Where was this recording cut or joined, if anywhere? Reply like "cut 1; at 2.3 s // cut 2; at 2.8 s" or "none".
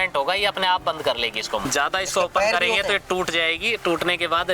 cut 1; at 1.6 s